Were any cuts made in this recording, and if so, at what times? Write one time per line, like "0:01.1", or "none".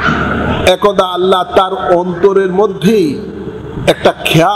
none